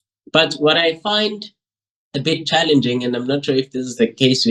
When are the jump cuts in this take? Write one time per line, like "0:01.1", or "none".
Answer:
none